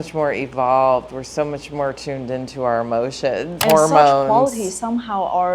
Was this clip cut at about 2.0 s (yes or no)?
no